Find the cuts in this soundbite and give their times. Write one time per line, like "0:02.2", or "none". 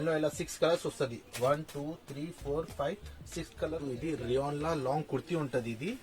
0:03.8